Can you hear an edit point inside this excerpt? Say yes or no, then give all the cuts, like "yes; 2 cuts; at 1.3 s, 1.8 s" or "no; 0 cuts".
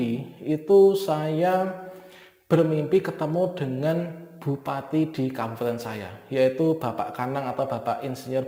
no; 0 cuts